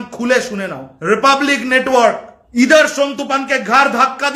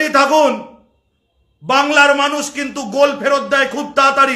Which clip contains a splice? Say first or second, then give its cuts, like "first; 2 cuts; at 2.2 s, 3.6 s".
first; 2 cuts; at 0.9 s, 2.3 s